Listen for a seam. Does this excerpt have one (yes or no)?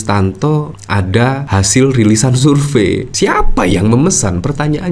no